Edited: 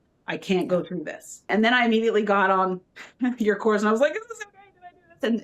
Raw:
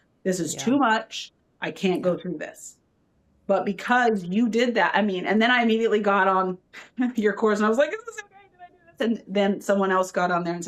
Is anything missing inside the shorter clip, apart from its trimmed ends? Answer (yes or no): yes